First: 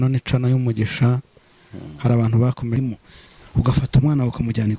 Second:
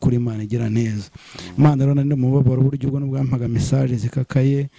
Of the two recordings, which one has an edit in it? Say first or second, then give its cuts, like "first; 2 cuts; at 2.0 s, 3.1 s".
first; 1 cut; at 2.8 s